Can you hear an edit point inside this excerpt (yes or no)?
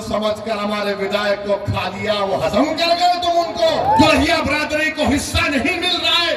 yes